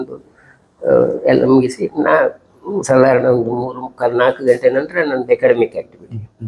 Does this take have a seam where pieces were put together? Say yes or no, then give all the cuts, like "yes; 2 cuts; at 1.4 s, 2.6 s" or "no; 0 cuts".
no; 0 cuts